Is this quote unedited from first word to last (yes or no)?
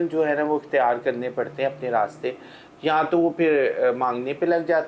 yes